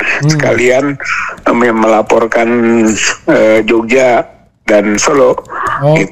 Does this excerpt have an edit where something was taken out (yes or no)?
no